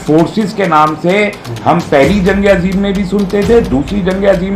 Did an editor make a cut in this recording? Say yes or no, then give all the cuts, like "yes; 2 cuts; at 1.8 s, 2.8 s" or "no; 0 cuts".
no; 0 cuts